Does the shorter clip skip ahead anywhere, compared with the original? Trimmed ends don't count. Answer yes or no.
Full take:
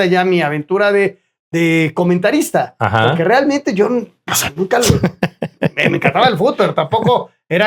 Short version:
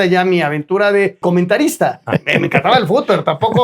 yes